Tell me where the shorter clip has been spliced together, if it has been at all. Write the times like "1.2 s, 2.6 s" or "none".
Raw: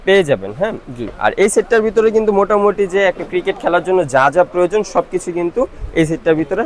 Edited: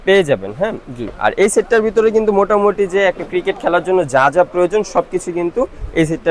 none